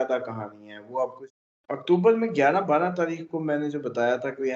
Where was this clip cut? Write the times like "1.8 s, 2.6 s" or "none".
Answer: 1.2 s